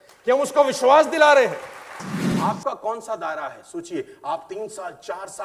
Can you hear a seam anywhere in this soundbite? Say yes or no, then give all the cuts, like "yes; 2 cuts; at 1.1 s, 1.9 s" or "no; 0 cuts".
yes; 1 cut; at 2.3 s